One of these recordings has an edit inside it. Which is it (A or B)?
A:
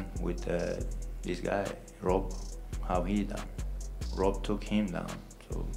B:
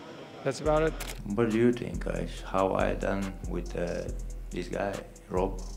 B